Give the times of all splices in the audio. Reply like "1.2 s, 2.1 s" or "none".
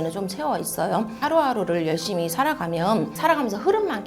1.1 s, 3.2 s